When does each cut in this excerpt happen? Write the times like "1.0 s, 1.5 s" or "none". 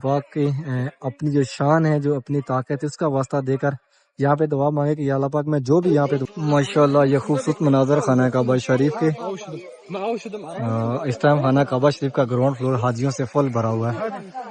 6.2 s